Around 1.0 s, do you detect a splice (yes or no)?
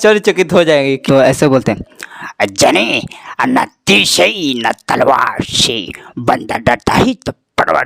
yes